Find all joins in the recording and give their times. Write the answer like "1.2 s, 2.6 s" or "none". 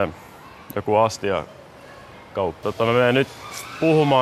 2.6 s